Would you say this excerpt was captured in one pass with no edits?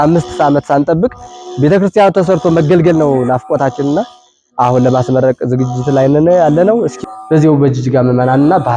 no; 1 cut; at 7.0 s

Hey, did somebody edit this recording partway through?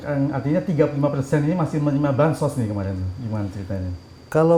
no; 0 cuts

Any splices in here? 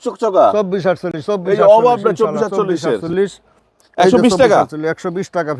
no; 0 cuts

